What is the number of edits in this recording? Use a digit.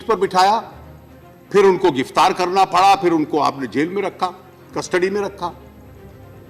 1